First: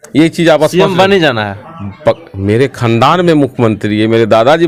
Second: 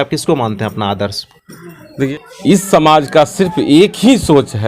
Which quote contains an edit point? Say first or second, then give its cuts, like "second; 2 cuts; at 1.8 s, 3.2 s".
second; 1 cut; at 2.3 s